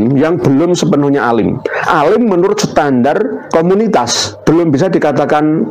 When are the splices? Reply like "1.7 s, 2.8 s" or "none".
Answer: 3.4 s, 4.2 s

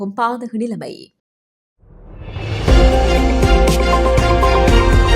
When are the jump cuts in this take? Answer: 1.2 s

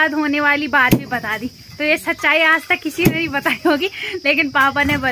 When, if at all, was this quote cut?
none

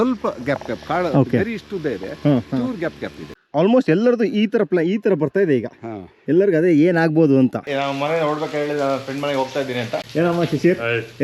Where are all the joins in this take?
3.3 s, 7.7 s, 10.1 s

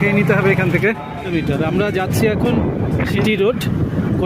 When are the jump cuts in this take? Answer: 1.3 s, 3.2 s

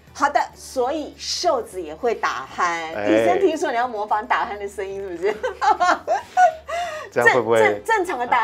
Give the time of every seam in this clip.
none

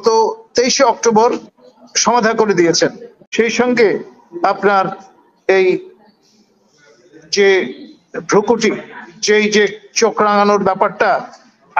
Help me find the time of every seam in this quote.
3.1 s

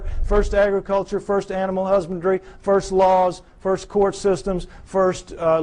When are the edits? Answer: 2.1 s

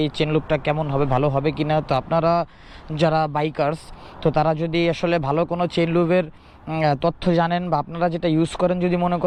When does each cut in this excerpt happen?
none

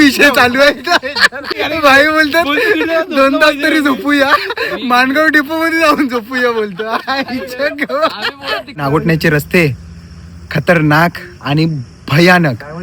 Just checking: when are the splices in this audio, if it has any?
1.5 s, 8.8 s

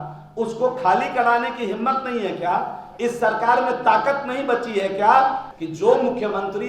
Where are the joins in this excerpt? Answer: 5.6 s

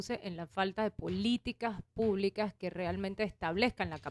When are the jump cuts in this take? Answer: none

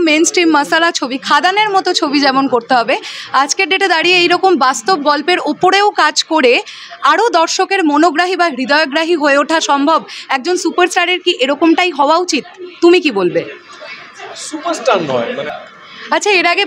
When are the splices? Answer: 15.6 s

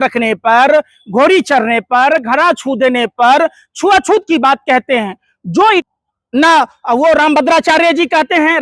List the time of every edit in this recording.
5.8 s

